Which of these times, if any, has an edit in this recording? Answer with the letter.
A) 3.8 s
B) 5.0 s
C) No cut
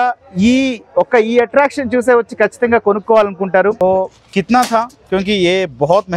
A